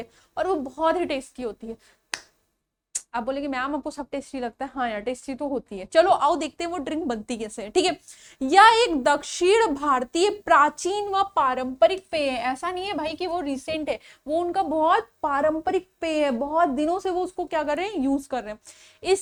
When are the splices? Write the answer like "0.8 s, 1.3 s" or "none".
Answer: none

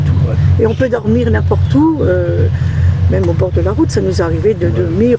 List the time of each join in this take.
none

